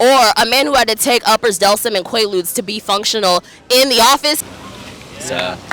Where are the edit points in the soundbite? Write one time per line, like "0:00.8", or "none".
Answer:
0:04.4